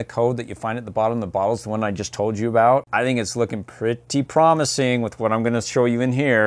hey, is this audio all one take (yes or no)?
yes